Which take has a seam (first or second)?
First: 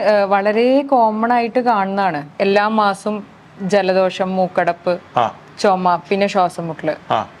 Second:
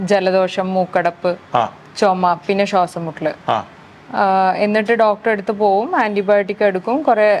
first